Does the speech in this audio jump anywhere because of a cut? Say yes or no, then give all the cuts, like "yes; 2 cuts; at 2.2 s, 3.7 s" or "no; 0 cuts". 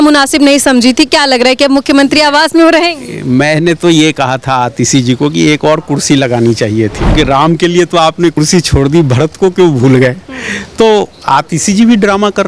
yes; 1 cut; at 7.1 s